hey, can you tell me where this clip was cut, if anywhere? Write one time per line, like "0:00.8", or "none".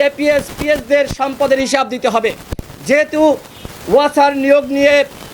none